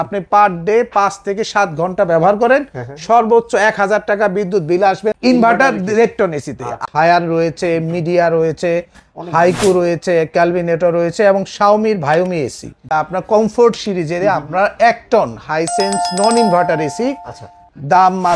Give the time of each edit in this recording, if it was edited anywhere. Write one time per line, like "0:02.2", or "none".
0:06.8
0:12.9